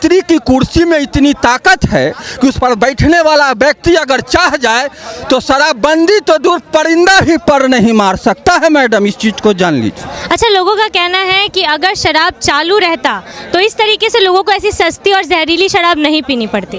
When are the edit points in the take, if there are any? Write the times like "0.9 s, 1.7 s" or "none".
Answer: none